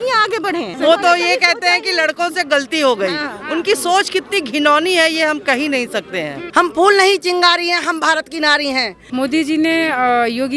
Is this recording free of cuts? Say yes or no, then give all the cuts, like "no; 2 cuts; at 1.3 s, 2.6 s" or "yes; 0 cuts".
no; 3 cuts; at 0.8 s, 6.4 s, 9.0 s